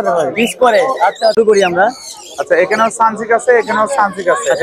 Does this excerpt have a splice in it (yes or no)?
yes